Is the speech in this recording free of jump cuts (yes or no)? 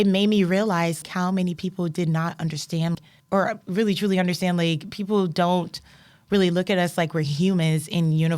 no